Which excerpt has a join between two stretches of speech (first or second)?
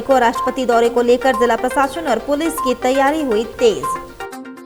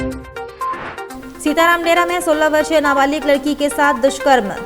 second